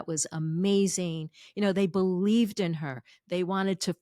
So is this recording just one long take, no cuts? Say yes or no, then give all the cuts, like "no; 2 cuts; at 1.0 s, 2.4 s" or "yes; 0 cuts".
yes; 0 cuts